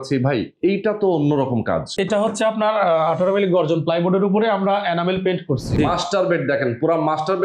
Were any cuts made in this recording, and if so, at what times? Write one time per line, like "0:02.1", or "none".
0:02.0
0:05.7